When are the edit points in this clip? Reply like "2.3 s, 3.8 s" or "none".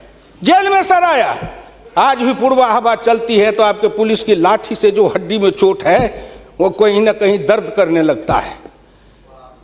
none

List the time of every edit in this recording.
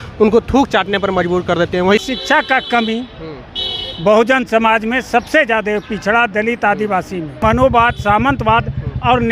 2.0 s, 7.4 s

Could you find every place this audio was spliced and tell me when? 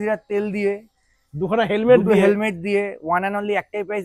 none

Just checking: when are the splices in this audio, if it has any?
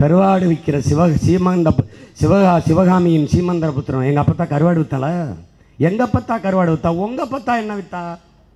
none

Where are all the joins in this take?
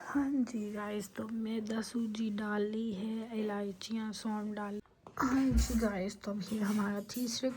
4.8 s

